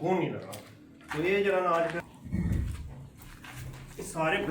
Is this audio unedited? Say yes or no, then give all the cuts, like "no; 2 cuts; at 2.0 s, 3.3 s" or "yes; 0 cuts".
no; 1 cut; at 2.0 s